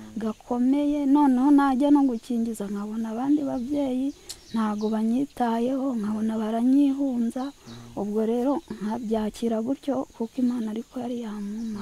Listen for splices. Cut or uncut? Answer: uncut